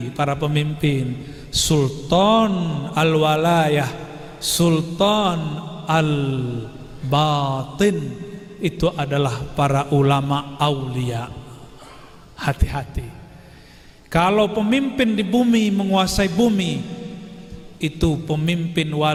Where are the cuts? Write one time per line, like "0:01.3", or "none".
none